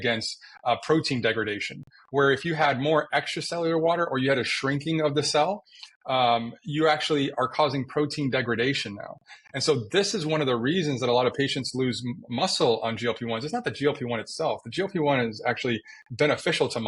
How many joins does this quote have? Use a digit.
0